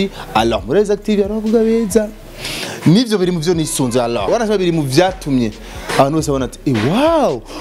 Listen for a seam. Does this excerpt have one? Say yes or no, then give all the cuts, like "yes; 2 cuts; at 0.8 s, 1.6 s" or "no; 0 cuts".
yes; 1 cut; at 4.3 s